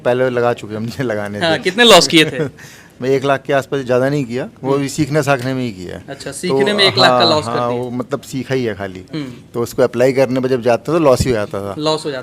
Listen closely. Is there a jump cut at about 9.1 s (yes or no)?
no